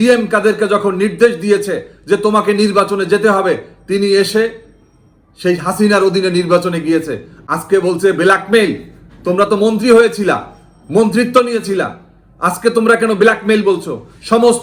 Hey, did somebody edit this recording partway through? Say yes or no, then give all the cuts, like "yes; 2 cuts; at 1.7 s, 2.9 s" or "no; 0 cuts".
no; 0 cuts